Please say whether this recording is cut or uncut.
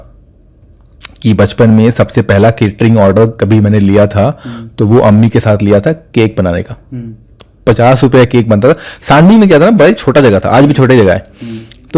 uncut